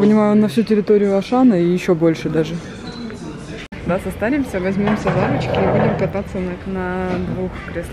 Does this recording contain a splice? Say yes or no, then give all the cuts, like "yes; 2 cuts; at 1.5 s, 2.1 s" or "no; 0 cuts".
yes; 1 cut; at 3.8 s